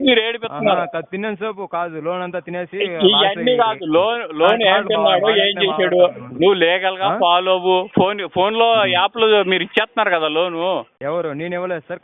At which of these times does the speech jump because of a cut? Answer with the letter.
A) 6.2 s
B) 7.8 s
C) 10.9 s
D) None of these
C